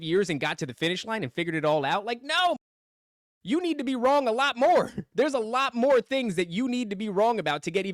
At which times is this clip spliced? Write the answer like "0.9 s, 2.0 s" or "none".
none